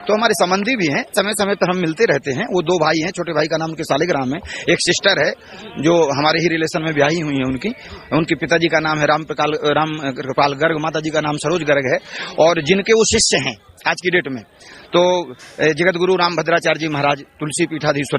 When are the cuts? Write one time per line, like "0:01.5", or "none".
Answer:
0:01.1